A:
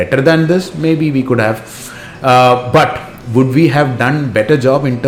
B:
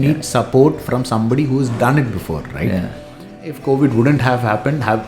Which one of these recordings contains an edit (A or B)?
B